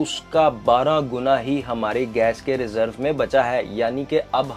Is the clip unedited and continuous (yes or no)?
yes